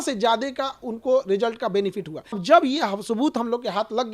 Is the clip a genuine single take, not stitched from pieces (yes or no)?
no